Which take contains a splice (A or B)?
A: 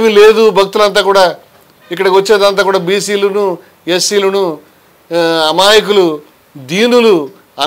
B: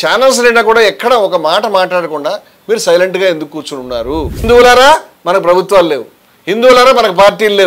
B